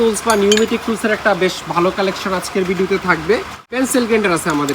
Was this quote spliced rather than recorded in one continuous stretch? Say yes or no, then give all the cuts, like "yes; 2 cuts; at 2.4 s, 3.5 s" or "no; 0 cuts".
yes; 1 cut; at 3.6 s